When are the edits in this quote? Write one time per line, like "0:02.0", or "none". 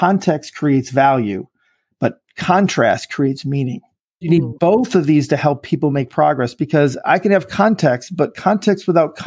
0:04.2